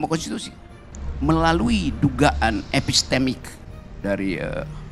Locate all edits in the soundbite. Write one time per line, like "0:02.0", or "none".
none